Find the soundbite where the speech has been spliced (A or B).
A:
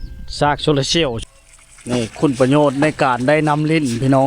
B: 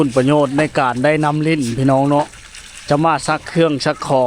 A